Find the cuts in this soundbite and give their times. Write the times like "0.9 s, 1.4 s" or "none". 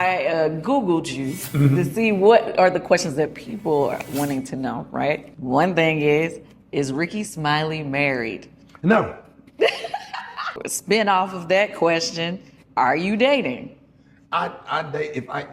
5.2 s, 10.7 s